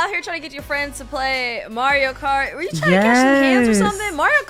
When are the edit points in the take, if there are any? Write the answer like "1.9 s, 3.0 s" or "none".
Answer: none